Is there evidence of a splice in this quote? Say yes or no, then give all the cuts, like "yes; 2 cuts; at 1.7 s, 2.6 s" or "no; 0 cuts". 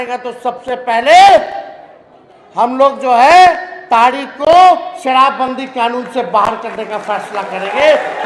no; 0 cuts